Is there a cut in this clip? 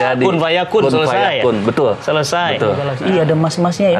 yes; 1 cut; at 2.9 s

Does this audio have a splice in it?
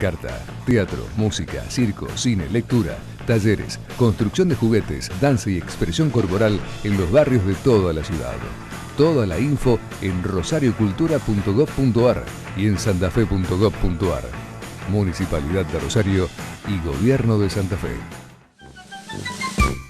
yes; 1 cut; at 18.4 s

